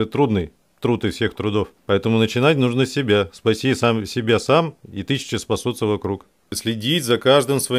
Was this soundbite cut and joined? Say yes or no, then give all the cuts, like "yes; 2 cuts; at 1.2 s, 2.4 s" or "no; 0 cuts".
yes; 2 cuts; at 1.8 s, 6.6 s